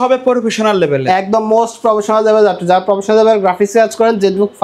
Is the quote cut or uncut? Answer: uncut